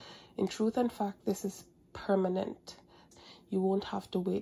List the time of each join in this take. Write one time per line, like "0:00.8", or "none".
0:03.1